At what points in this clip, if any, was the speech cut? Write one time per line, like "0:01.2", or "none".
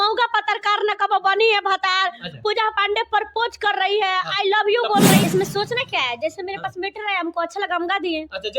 0:05.2